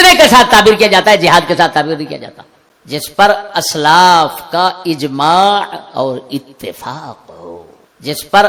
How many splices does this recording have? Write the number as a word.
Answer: zero